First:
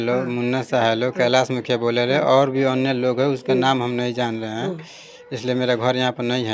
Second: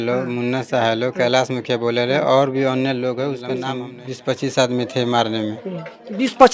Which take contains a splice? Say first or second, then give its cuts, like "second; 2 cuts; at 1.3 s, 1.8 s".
second; 1 cut; at 3.7 s